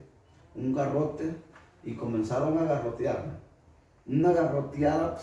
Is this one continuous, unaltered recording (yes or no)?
yes